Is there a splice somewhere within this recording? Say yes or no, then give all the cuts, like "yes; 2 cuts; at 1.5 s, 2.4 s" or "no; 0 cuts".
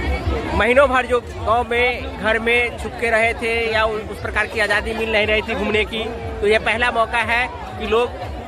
no; 0 cuts